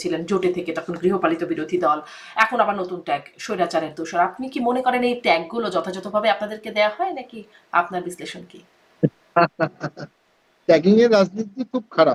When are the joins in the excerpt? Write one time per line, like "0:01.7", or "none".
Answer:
none